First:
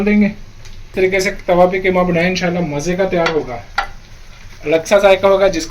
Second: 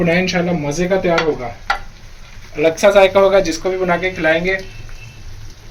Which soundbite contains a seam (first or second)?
first